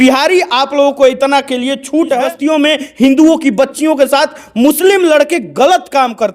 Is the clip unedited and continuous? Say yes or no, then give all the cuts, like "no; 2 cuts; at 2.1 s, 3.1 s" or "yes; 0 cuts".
no; 1 cut; at 2.2 s